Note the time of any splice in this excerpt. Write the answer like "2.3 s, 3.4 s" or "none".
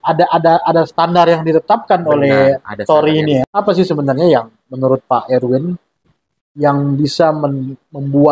3.5 s